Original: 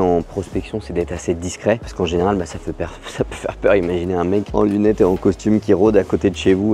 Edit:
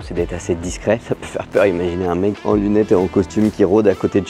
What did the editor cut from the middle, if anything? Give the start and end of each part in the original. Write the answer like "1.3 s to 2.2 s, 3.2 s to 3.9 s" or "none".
1.8 s to 3.1 s